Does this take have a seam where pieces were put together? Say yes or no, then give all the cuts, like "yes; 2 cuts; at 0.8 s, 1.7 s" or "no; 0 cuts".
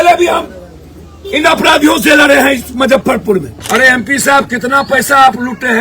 yes; 1 cut; at 3.6 s